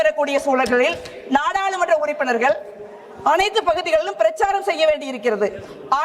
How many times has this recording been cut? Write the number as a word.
zero